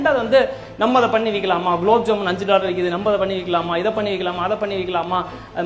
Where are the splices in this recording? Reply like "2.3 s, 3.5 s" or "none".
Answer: none